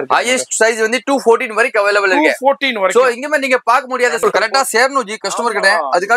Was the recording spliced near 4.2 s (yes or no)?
yes